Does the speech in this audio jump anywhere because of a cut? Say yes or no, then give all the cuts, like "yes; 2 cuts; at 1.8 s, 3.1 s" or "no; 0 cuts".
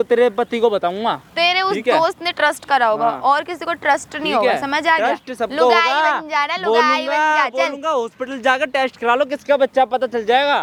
no; 0 cuts